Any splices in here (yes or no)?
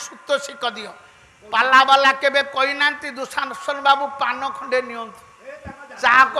no